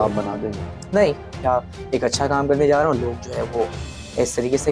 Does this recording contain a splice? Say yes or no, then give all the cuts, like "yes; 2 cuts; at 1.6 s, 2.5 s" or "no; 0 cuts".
yes; 1 cut; at 1.3 s